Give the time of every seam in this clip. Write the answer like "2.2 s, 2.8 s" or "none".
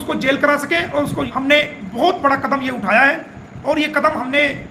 1.3 s

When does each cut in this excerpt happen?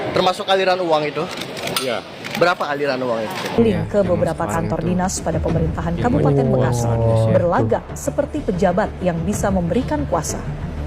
3.6 s

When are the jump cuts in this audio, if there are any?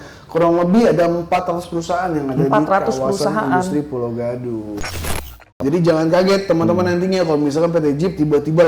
4.9 s

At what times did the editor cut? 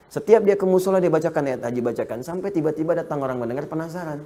none

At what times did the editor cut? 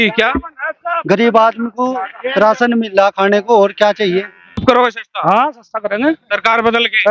4.6 s

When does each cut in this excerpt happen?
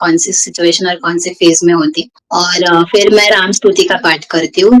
2.1 s

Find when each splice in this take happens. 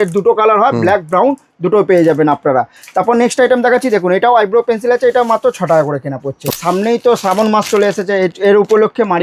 6.4 s

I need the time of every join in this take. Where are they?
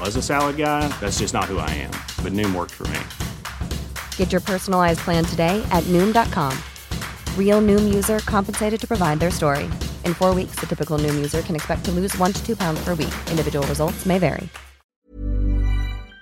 14.9 s

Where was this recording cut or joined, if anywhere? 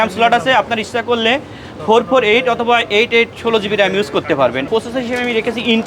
4.7 s

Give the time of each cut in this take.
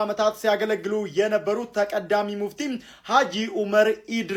none

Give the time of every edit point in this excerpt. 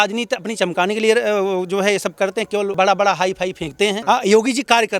2.7 s, 4.0 s

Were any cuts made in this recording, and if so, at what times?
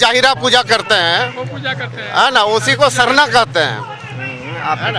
none

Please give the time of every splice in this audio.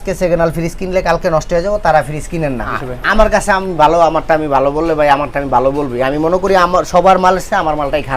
2.8 s

